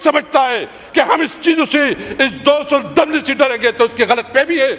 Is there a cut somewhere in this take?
no; 0 cuts

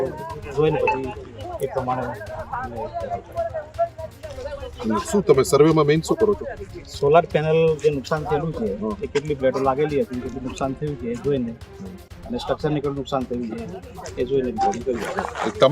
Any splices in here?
no; 0 cuts

